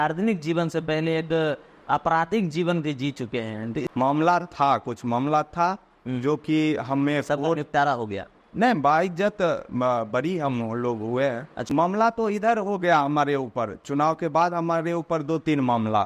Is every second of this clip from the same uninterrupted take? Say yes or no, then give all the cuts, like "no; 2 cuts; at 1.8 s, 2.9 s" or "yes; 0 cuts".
no; 2 cuts; at 3.8 s, 11.7 s